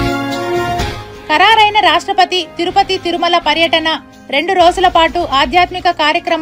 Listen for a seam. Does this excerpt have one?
yes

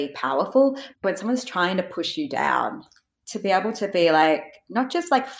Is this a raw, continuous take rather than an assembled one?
no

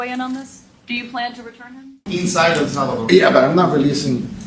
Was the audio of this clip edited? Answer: yes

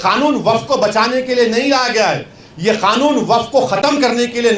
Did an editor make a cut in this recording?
no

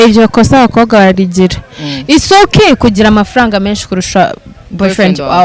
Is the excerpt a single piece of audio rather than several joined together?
yes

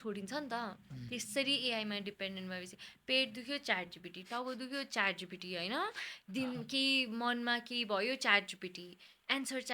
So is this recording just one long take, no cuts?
yes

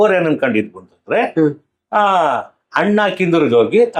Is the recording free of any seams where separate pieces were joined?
yes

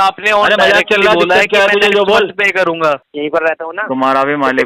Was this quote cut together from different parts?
yes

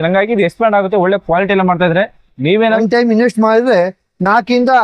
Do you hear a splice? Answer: yes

